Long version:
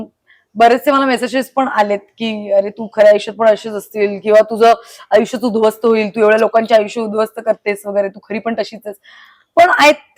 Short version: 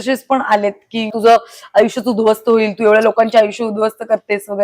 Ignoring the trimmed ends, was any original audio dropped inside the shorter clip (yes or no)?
yes